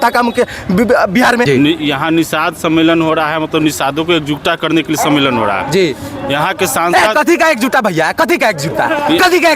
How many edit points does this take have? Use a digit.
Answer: 1